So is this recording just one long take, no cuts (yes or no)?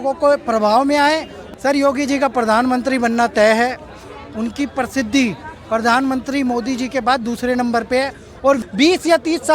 no